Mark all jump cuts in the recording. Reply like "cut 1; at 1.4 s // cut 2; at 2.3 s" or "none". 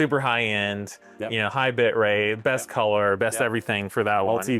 none